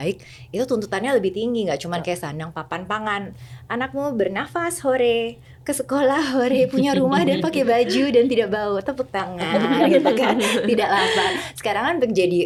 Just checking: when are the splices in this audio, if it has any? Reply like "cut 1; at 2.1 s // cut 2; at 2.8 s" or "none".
none